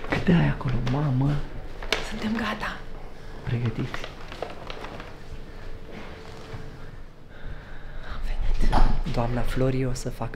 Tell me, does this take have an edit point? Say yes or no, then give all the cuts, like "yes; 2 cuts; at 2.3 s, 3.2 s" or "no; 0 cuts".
no; 0 cuts